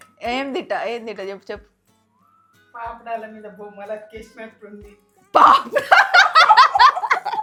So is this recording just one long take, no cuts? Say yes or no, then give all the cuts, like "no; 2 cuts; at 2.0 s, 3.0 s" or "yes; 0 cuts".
yes; 0 cuts